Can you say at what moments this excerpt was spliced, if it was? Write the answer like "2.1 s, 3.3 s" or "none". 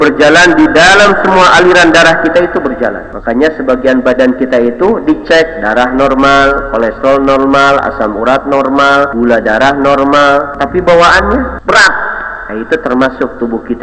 3.1 s, 9.1 s, 10.6 s, 11.6 s